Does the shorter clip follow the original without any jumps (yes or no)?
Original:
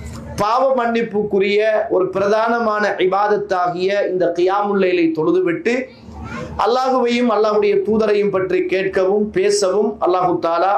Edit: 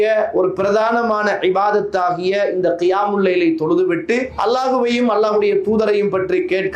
no